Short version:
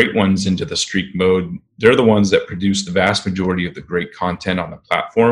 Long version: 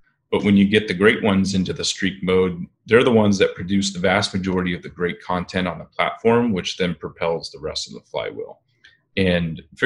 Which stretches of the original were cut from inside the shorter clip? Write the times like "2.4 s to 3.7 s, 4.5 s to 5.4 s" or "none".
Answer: none

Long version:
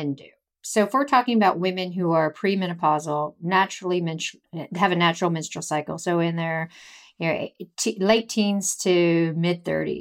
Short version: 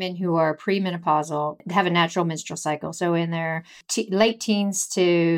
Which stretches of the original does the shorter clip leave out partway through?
3.4 s to 4.6 s, 6.8 s to 7.7 s

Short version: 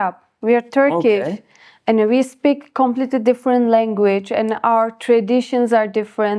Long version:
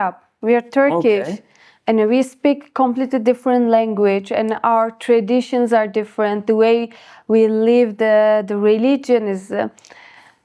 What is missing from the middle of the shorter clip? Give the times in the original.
none

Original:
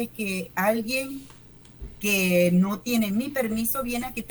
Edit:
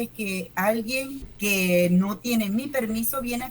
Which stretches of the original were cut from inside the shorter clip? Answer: 1.2 s to 1.8 s

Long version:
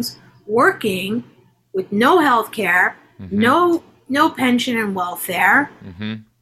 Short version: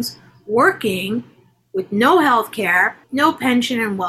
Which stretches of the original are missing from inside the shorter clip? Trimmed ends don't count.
3.0 s to 4.0 s

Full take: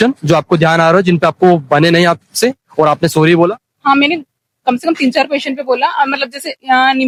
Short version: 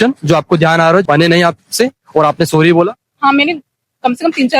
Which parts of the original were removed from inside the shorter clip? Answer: 1.0 s to 1.7 s

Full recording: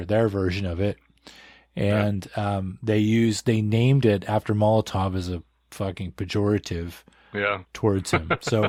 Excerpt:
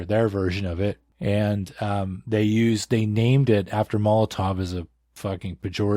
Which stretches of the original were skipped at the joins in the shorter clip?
1.1 s to 1.6 s

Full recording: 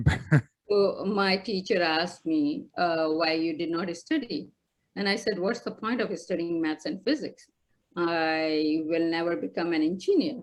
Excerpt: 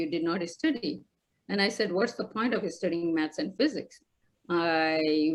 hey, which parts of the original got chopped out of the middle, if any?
none

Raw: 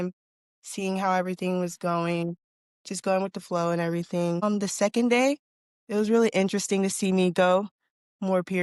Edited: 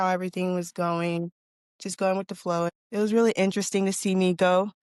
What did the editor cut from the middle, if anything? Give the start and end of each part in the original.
3.8 s to 5.7 s

